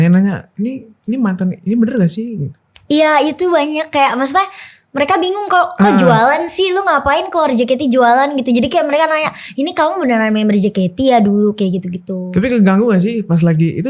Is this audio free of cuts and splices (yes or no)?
yes